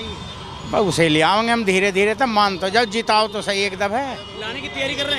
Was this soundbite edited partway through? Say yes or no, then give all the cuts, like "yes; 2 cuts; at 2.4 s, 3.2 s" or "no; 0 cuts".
no; 0 cuts